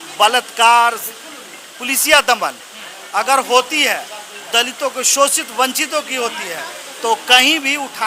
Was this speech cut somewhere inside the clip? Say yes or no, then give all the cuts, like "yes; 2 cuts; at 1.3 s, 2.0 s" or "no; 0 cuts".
no; 0 cuts